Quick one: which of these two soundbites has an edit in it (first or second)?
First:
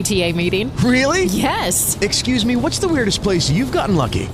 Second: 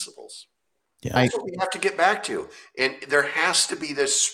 second